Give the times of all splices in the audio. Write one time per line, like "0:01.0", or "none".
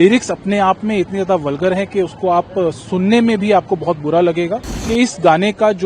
0:04.7